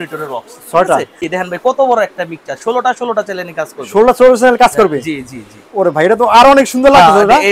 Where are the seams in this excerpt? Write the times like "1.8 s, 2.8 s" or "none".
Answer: 1.3 s